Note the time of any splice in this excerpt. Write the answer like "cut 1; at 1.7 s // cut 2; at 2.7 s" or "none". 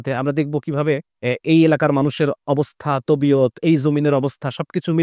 cut 1; at 1.1 s